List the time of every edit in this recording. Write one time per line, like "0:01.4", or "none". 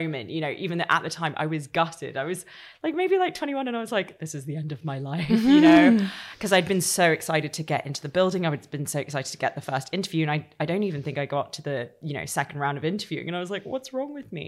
none